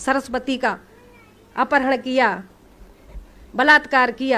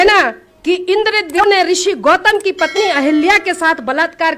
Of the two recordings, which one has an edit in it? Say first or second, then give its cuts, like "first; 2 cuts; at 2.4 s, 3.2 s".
second; 1 cut; at 1.4 s